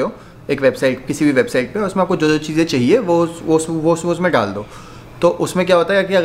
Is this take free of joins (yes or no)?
yes